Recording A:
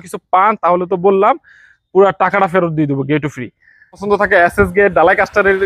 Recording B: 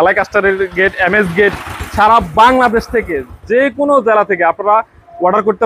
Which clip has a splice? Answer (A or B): A